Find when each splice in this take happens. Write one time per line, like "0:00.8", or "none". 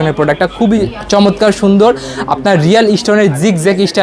none